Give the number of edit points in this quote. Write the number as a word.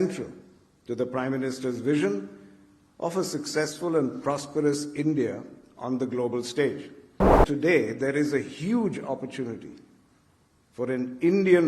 one